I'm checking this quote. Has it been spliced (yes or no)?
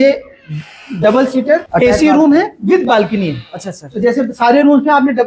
yes